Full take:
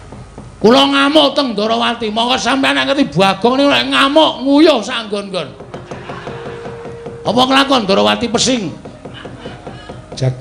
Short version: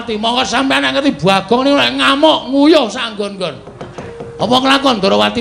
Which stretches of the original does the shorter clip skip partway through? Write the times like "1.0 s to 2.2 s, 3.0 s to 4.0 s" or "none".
6.0 s to 6.9 s